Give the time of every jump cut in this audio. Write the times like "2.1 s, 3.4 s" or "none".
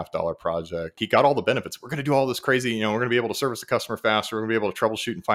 1.0 s

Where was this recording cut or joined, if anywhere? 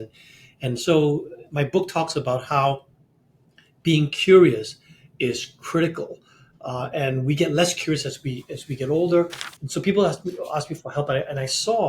9.4 s

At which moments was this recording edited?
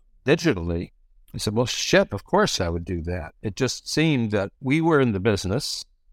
2.6 s, 4.5 s

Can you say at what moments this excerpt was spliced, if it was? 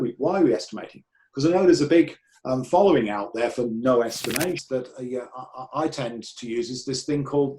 4.6 s

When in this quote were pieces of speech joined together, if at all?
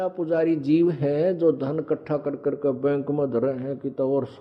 none

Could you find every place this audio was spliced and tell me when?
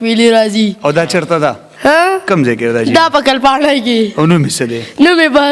none

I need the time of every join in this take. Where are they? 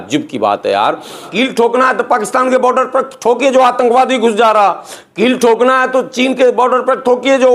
1.3 s

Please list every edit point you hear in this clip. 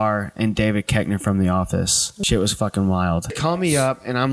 2.1 s, 3.4 s

